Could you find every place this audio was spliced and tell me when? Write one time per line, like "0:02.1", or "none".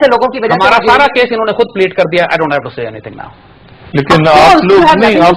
none